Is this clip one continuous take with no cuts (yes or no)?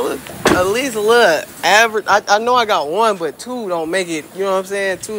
yes